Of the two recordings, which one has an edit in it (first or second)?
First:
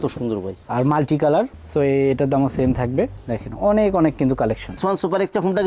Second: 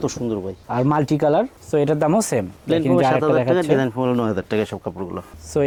first